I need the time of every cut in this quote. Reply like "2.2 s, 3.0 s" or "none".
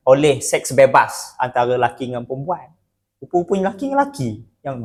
none